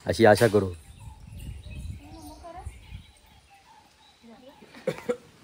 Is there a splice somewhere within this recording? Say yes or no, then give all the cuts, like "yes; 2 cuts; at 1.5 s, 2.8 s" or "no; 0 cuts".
yes; 2 cuts; at 1.0 s, 3.1 s